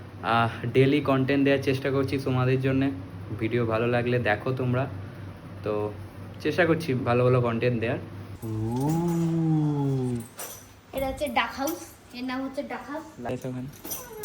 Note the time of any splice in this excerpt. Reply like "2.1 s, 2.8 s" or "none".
8.5 s, 13.3 s